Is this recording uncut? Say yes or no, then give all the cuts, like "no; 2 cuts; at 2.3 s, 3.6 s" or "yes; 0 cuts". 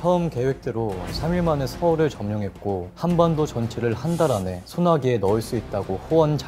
no; 2 cuts; at 2.9 s, 4.6 s